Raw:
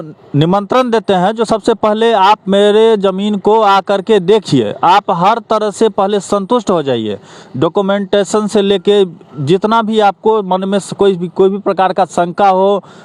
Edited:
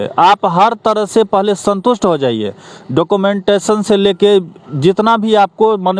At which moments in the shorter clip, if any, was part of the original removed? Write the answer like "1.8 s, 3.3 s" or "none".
none

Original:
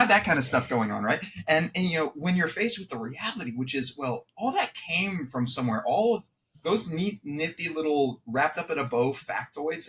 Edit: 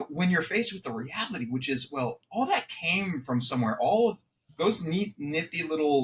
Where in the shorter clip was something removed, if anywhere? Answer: none

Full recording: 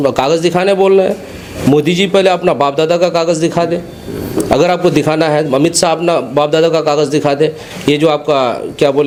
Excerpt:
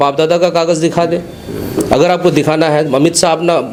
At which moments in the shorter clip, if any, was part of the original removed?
none

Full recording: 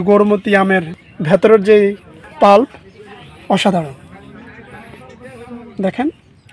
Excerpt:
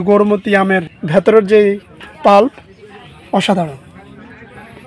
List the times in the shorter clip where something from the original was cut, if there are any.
0.9 s

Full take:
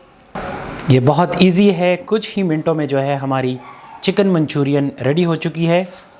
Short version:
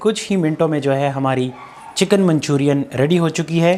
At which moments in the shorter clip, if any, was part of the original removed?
none

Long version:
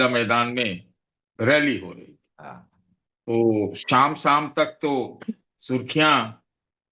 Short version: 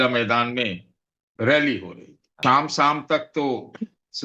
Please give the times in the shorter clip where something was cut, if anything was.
2.3 s

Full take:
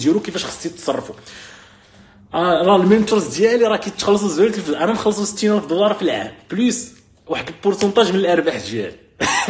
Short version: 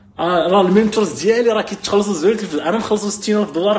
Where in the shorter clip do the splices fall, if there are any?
none

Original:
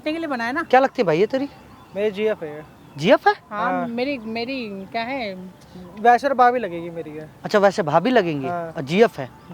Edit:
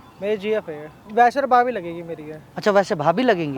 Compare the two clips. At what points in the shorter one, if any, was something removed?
0.9 s

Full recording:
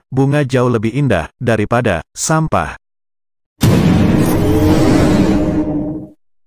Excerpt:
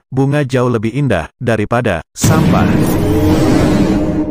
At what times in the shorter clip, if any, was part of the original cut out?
2.1 s

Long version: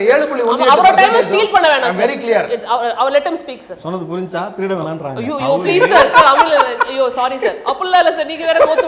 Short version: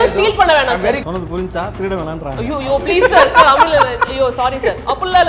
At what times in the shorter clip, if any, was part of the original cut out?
1.0 s

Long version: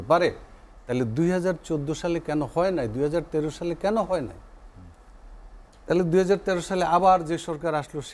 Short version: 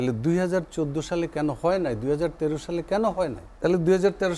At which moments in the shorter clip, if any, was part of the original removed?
3.4 s

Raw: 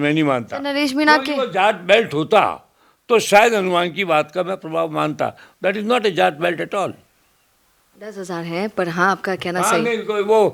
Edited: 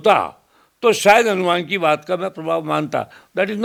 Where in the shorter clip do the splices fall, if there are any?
none

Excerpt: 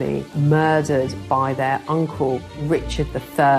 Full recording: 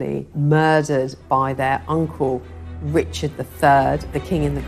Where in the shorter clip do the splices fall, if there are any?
2.5 s

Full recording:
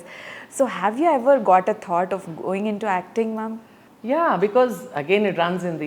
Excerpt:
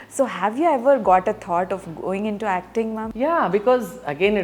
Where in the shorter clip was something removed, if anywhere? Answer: 3.1 s

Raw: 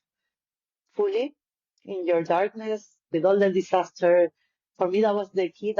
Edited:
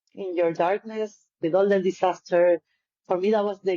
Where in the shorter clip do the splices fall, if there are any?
none

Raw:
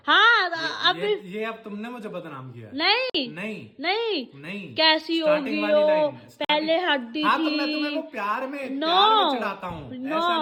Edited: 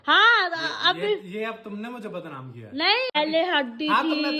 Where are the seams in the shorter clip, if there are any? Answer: 3.1 s

